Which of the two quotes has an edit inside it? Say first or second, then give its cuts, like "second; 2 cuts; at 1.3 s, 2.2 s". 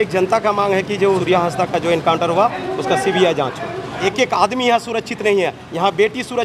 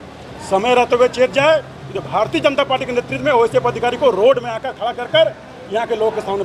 first; 2 cuts; at 1.2 s, 3.9 s